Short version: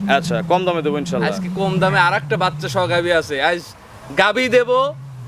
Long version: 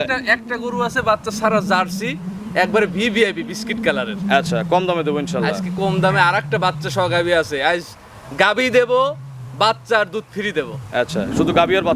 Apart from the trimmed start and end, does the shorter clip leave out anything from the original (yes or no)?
no